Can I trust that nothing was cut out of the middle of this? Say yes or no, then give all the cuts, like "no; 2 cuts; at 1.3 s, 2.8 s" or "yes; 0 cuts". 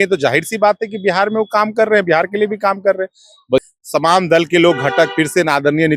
no; 1 cut; at 3.6 s